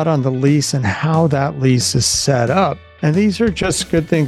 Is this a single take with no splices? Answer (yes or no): no